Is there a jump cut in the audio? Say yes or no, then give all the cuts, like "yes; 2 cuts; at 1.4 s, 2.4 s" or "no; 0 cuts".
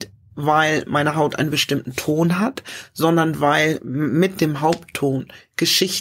no; 0 cuts